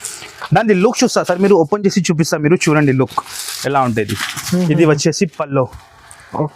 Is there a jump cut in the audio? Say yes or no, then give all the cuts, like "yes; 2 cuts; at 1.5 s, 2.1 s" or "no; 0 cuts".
no; 0 cuts